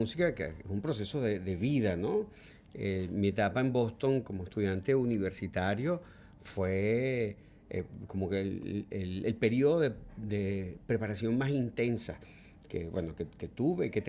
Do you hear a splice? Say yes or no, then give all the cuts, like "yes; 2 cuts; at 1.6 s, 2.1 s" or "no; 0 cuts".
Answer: no; 0 cuts